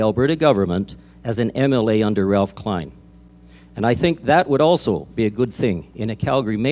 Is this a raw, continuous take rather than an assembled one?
yes; 0 cuts

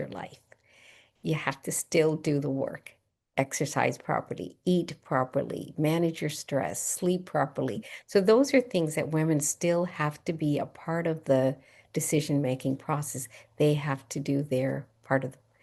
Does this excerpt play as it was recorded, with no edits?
yes; 0 cuts

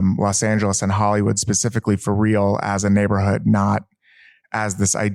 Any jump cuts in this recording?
no; 0 cuts

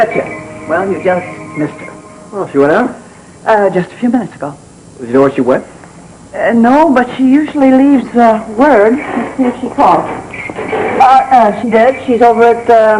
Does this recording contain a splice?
yes; 1 cut; at 9.6 s

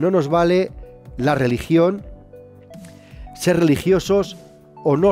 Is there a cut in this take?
no; 0 cuts

